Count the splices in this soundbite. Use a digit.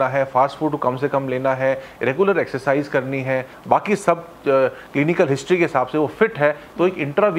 1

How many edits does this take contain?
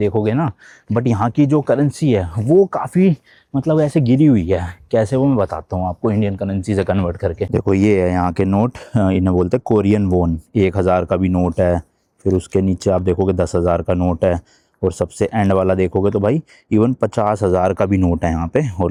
0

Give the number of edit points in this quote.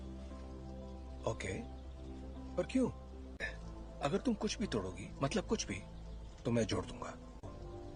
0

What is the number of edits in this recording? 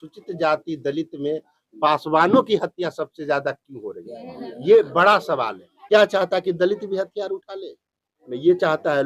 1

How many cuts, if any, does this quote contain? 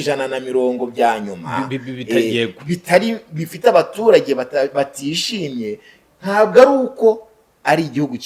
0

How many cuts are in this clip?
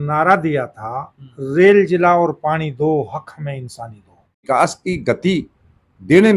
1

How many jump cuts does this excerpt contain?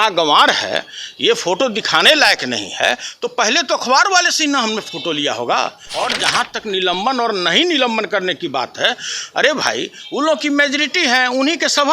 1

